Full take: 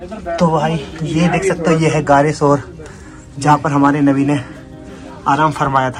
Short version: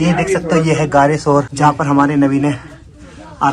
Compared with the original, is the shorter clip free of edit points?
no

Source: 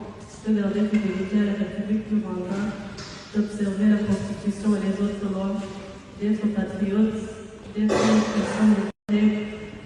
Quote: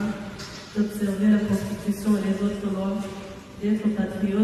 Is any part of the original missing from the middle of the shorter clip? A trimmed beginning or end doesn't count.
no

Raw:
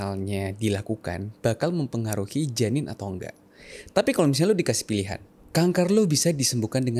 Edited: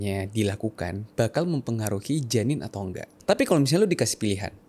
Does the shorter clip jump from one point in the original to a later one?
yes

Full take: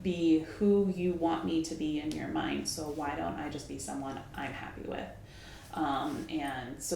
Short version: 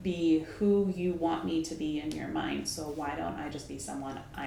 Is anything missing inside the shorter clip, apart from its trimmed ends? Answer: no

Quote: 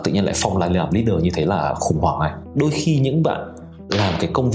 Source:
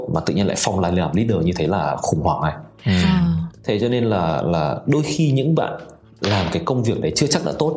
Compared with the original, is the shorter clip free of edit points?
no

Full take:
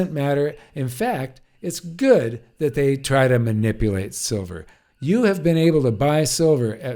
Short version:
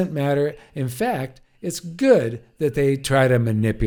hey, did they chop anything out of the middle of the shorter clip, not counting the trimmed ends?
no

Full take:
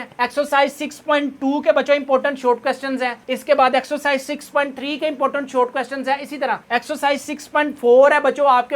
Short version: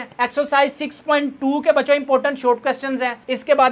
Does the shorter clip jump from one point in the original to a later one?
no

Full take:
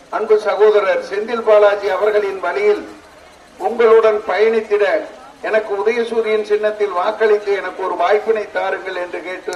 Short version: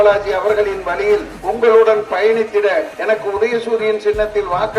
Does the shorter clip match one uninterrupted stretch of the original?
no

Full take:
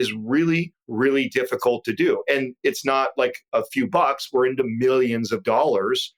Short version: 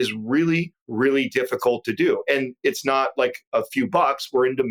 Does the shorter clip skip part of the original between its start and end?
no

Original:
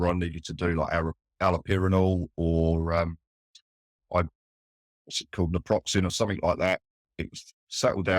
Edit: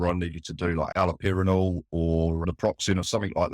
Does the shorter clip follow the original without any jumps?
no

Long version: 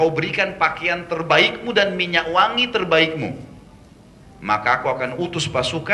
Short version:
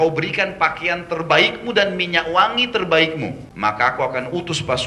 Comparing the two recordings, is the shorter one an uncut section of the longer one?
no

